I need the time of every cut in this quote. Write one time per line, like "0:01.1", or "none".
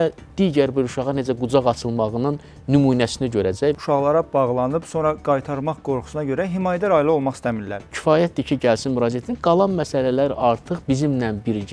0:03.8
0:07.9